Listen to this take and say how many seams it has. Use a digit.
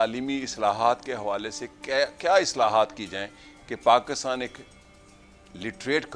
0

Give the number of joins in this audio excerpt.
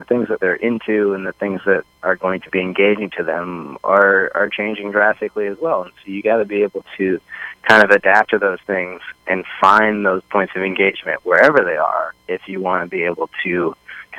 0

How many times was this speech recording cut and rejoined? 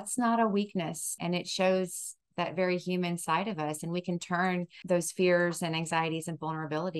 2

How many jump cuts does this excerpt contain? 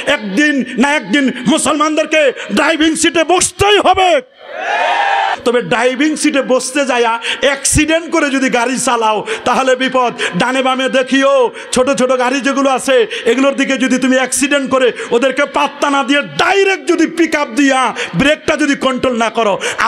1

